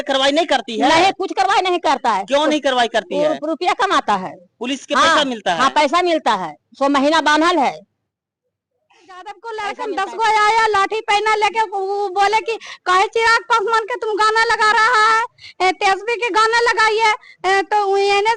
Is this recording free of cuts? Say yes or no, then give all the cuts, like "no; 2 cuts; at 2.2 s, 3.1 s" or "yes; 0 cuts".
no; 1 cut; at 9.4 s